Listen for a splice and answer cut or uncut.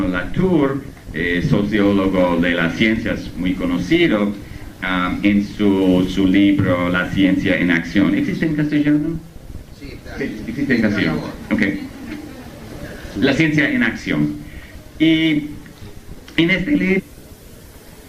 uncut